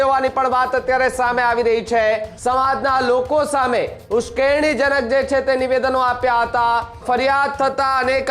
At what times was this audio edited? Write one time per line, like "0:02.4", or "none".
0:02.3
0:07.0